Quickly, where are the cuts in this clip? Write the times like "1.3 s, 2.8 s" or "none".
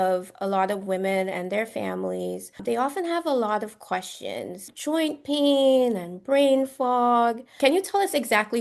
2.6 s, 4.7 s, 7.5 s

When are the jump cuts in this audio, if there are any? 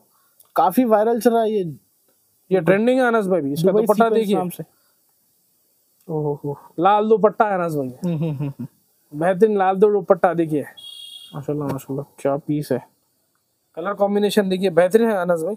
10.8 s

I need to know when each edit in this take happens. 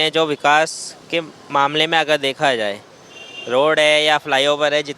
none

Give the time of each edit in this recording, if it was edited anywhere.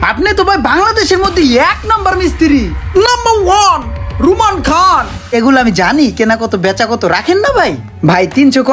5.3 s

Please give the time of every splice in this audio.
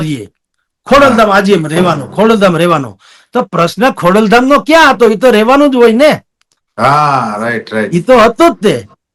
none

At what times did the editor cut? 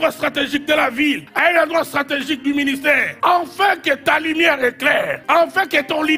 1.3 s, 3.1 s, 5.2 s

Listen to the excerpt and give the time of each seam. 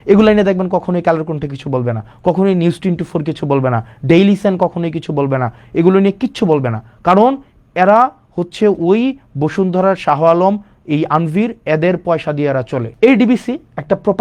12.8 s

